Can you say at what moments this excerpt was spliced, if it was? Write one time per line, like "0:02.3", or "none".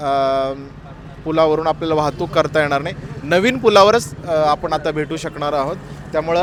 none